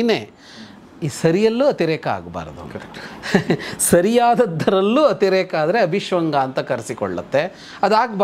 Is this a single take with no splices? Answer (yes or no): yes